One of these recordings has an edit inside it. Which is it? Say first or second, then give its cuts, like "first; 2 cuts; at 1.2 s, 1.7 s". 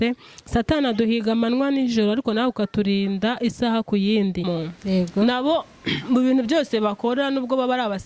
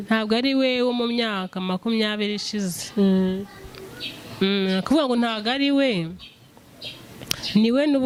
first; 1 cut; at 4.5 s